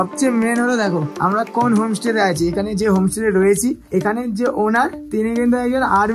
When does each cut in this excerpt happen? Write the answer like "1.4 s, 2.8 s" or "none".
1.1 s, 3.8 s, 5.0 s